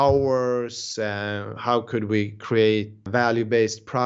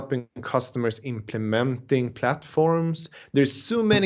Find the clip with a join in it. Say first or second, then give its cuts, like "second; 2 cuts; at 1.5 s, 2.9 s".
first; 1 cut; at 3.0 s